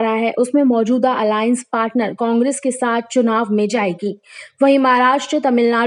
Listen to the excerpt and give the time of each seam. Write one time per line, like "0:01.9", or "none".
none